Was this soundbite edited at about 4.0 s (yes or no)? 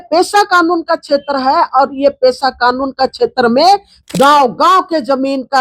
yes